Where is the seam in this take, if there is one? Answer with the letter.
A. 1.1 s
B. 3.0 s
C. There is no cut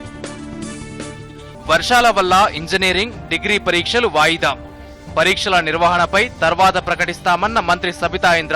A